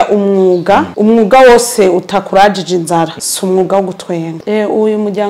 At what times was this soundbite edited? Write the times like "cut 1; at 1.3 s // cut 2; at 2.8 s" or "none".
cut 1; at 0.9 s // cut 2; at 3.2 s // cut 3; at 4.3 s